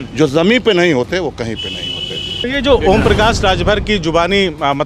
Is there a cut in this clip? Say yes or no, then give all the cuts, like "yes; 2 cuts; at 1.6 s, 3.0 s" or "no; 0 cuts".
yes; 1 cut; at 2.5 s